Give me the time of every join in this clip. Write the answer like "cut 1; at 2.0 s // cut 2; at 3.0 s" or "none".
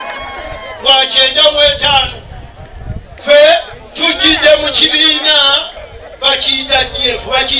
cut 1; at 3.1 s